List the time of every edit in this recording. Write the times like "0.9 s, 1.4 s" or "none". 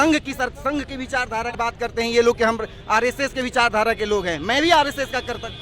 1.5 s